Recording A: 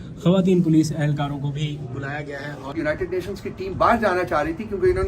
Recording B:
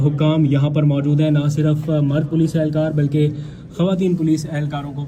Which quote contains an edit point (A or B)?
A